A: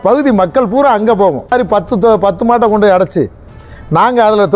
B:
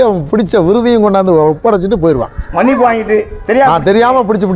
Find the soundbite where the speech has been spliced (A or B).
A